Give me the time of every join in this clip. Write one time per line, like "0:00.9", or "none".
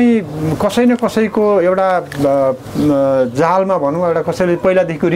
none